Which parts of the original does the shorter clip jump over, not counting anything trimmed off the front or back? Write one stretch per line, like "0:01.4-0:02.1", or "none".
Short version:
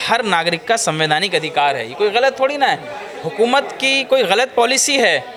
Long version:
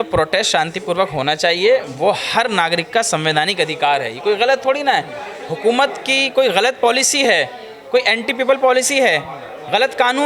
none